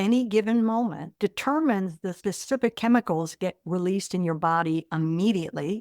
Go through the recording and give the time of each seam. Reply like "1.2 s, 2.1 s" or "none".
1.1 s, 2.1 s